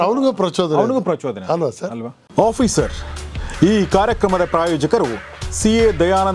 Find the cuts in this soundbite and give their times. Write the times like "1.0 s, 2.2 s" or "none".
2.2 s